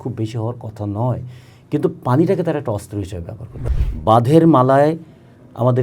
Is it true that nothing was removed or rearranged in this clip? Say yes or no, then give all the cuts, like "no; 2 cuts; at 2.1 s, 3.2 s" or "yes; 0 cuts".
no; 1 cut; at 3.6 s